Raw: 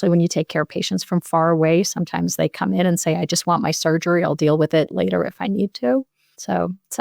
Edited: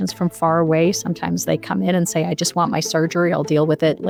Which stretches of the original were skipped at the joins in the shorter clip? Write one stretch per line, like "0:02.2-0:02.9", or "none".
none